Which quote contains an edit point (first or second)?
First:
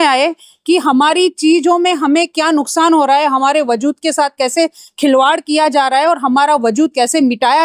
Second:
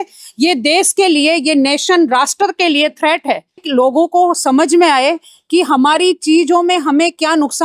second